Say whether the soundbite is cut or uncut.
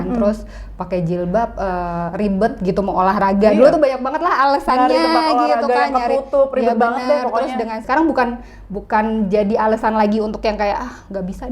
cut